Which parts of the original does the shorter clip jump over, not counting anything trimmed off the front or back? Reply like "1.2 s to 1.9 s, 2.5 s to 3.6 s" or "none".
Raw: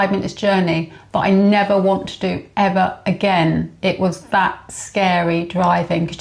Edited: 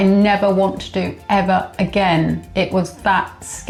none